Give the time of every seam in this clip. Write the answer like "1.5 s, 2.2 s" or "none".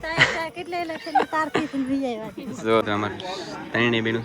2.8 s